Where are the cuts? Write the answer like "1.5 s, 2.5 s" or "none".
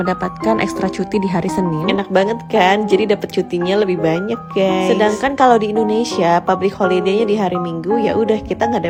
none

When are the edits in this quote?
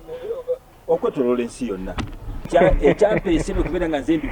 2.5 s

